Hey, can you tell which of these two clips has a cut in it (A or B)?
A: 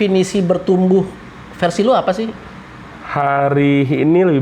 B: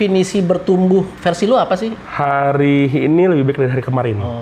B